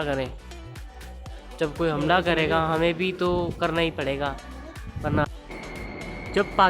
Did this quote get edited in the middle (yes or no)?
yes